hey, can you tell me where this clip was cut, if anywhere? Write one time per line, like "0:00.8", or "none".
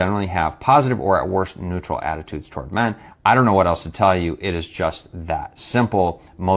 0:02.4